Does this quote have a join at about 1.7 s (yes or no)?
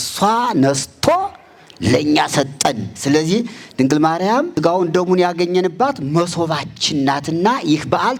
no